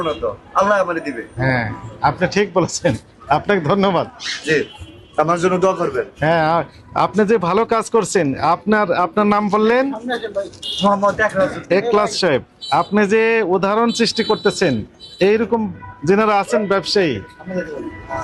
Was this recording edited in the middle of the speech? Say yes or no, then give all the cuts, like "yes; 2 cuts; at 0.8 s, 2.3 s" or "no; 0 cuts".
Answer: no; 0 cuts